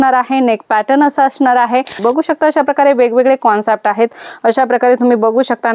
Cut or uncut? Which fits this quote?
cut